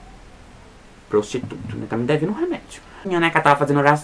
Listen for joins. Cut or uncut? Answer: cut